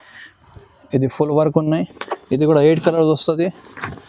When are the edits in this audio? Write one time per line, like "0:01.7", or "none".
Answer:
none